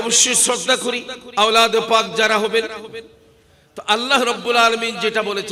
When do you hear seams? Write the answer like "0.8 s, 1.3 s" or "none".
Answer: 1.1 s